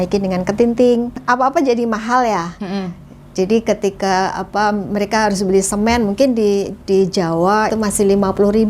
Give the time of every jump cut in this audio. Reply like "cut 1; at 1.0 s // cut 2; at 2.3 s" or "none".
cut 1; at 1.2 s // cut 2; at 7.7 s